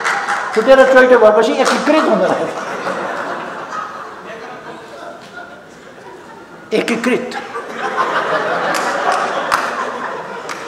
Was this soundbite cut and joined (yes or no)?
no